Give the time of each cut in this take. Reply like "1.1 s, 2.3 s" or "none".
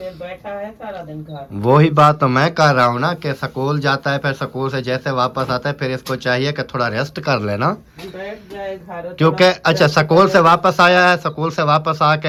none